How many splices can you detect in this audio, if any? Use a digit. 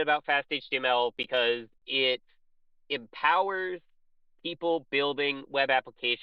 0